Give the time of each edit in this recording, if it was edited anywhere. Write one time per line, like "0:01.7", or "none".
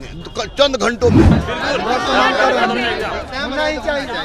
0:01.4